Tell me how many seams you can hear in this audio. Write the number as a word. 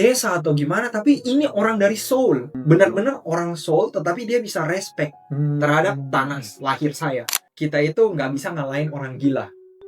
two